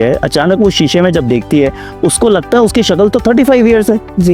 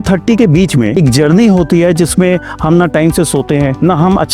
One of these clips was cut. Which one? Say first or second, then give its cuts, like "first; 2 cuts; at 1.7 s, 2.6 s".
second; 1 cut; at 1.0 s